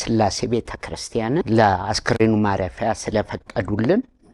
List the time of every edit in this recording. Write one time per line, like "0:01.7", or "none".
0:01.3